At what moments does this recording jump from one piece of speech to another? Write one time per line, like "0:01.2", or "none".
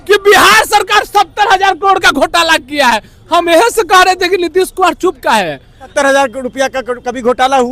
0:05.9